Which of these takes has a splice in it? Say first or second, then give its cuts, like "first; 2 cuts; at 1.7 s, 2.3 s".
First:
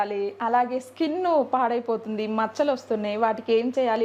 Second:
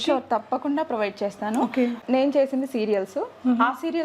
second; 1 cut; at 2.0 s